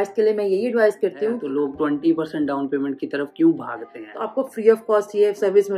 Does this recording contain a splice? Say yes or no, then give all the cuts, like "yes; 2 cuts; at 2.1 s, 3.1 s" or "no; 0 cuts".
yes; 2 cuts; at 1.4 s, 4.0 s